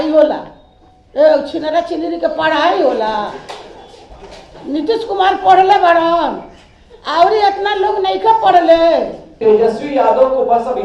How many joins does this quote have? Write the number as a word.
one